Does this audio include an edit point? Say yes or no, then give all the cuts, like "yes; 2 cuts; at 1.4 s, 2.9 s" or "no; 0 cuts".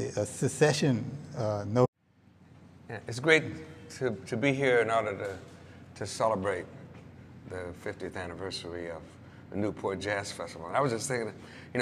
no; 0 cuts